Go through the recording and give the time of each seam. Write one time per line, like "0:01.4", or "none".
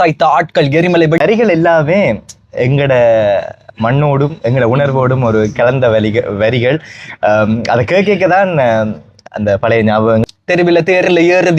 0:01.2
0:10.2